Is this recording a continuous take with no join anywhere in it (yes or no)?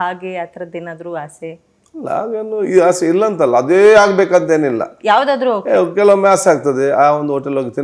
yes